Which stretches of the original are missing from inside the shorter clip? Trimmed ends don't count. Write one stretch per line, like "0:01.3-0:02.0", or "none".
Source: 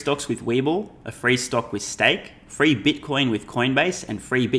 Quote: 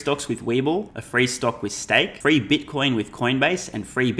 0:01.0-0:01.1
0:02.2-0:02.5